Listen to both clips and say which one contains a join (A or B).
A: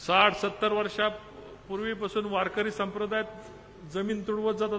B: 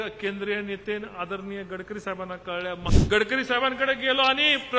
B